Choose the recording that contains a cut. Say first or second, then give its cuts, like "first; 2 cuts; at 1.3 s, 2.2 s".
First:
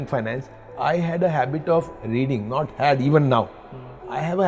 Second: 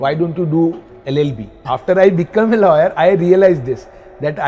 second; 1 cut; at 1.5 s